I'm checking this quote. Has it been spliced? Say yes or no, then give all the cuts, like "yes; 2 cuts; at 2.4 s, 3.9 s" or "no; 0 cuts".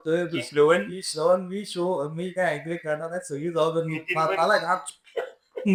no; 0 cuts